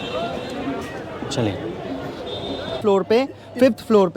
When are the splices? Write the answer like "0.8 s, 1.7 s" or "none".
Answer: 2.8 s